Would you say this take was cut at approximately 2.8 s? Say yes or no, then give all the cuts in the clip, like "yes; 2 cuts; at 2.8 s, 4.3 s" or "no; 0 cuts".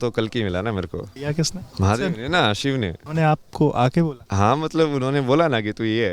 no; 2 cuts; at 1.5 s, 4.2 s